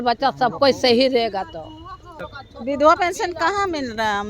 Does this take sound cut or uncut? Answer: cut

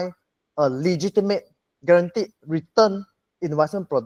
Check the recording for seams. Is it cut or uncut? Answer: uncut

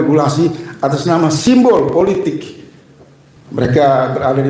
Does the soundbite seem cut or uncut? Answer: uncut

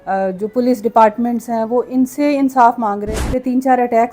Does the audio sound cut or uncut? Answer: cut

